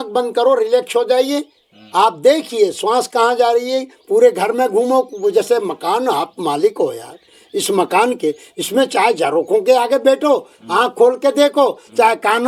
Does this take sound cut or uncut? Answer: uncut